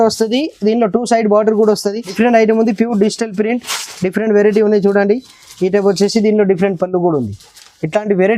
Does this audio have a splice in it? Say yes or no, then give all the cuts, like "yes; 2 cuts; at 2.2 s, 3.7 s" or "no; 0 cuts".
yes; 1 cut; at 2.0 s